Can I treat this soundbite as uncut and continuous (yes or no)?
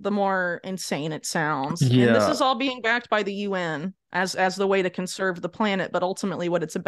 yes